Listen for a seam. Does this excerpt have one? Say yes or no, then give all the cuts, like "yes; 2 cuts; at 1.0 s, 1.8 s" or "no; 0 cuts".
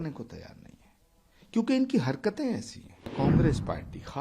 yes; 1 cut; at 3.1 s